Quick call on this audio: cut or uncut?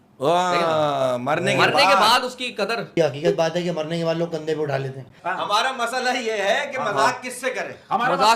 cut